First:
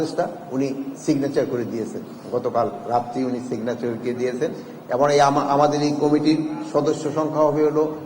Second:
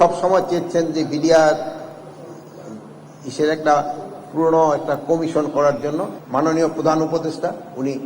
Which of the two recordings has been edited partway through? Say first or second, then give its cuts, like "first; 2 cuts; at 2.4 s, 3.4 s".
second; 1 cut; at 6.2 s